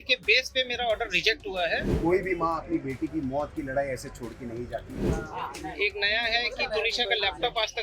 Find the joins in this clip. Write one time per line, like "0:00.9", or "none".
0:01.9
0:05.0